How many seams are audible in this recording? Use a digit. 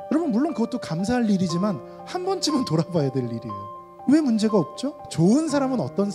1